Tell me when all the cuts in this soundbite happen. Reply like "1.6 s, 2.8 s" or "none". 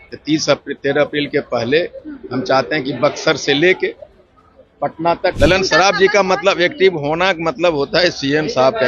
5.3 s